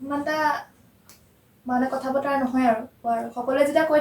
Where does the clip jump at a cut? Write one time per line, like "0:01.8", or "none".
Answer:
0:03.0